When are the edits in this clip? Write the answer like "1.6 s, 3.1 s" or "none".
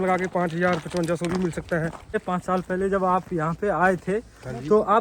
2.1 s